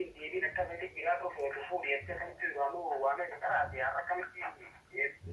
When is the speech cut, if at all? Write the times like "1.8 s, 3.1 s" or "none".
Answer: none